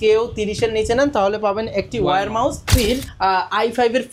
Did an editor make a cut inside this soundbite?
yes; 1 cut; at 2.7 s

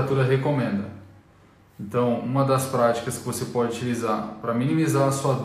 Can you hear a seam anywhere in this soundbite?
no; 0 cuts

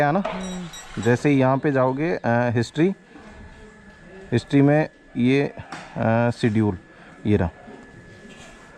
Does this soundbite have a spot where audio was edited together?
no; 0 cuts

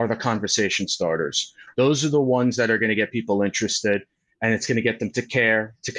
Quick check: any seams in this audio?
no; 0 cuts

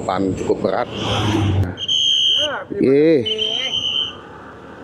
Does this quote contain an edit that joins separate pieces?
yes; 1 cut; at 1.6 s

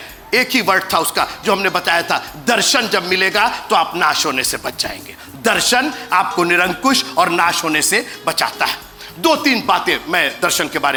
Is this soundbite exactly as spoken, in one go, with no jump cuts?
yes; 0 cuts

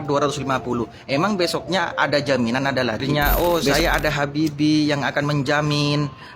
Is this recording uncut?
no; 1 cut; at 3.1 s

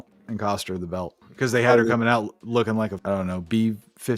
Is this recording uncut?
no; 1 cut; at 3.0 s

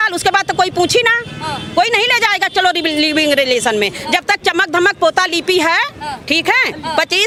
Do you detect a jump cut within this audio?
no; 0 cuts

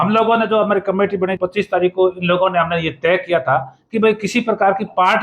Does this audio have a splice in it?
yes; 1 cut; at 1.4 s

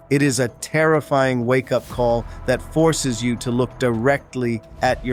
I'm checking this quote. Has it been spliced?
no; 0 cuts

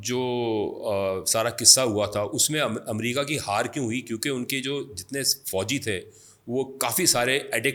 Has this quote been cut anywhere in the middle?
no; 0 cuts

